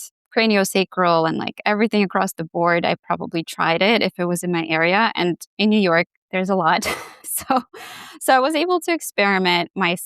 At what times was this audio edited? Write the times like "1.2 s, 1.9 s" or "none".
none